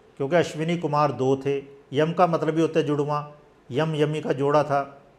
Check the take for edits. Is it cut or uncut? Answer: uncut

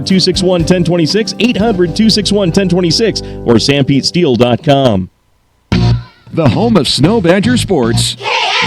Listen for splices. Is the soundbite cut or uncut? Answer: cut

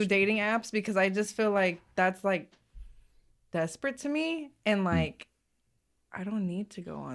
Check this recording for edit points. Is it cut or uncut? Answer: uncut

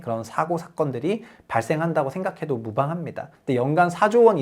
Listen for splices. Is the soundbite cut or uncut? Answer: cut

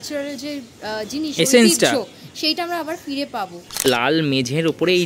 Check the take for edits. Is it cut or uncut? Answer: cut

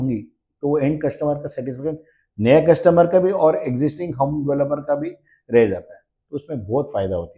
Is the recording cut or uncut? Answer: uncut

